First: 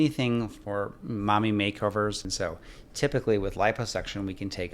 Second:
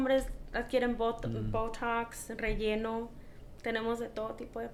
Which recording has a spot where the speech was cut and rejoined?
first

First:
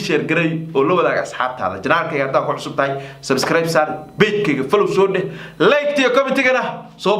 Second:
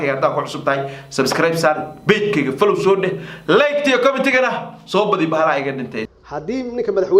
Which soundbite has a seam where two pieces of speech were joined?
second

